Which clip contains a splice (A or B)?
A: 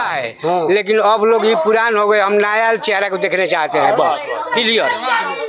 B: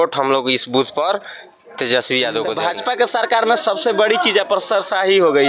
B